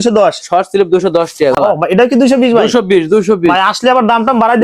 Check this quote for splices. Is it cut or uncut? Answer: cut